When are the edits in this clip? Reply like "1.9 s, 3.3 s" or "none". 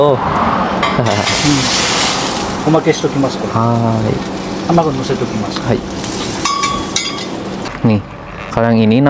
7.7 s